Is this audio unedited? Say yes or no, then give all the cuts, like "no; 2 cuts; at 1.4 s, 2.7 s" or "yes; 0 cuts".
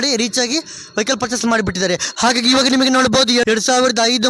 no; 2 cuts; at 2.1 s, 3.4 s